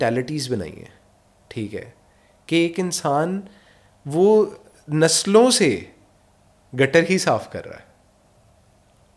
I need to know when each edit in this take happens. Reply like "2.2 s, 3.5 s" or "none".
none